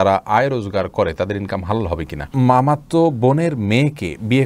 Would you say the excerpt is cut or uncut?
cut